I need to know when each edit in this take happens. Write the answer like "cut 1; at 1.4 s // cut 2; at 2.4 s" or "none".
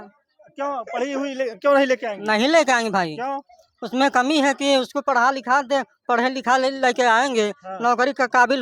none